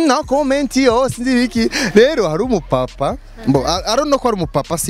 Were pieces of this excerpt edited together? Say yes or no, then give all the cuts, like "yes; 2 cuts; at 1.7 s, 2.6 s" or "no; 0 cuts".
no; 0 cuts